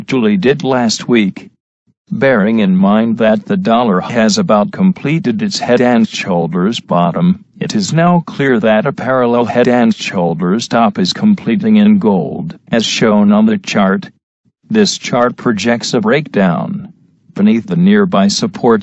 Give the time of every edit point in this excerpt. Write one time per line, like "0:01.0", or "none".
0:02.7